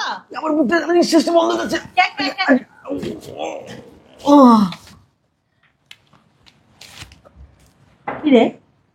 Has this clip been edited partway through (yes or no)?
no